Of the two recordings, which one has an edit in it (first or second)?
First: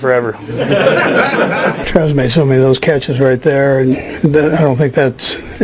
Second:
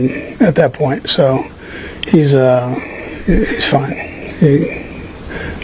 first